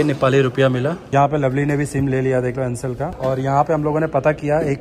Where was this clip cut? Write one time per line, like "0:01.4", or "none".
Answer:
0:01.0
0:03.0